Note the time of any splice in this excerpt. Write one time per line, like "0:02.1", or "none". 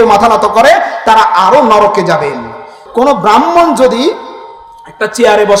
0:02.8